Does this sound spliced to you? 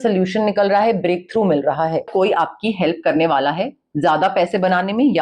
yes; 1 cut; at 2.1 s

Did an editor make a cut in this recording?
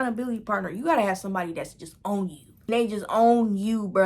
yes; 1 cut; at 2.5 s

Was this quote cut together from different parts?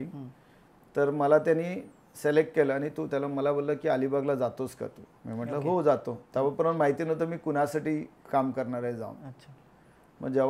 no; 0 cuts

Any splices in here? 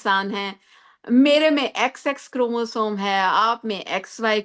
no; 0 cuts

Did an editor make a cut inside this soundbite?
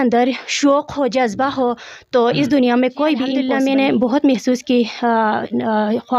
yes; 1 cut; at 3.4 s

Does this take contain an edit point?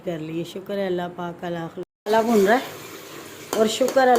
yes; 1 cut; at 1.9 s

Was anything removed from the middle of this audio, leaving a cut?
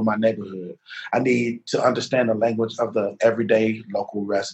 no; 0 cuts

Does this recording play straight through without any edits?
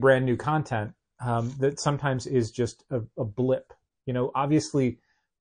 yes; 0 cuts

